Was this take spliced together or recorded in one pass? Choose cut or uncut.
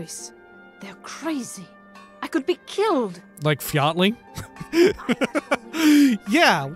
cut